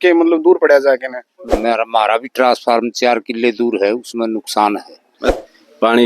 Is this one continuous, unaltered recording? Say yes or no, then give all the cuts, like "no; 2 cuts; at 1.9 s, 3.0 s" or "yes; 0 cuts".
no; 2 cuts; at 1.5 s, 5.3 s